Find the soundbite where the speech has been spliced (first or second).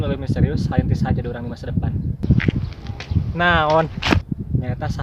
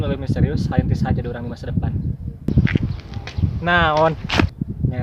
first